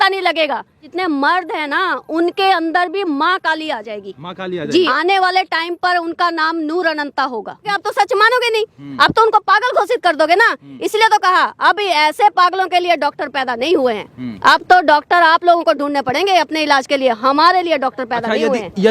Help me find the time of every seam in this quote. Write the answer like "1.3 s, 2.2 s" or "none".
0.9 s, 4.9 s, 7.8 s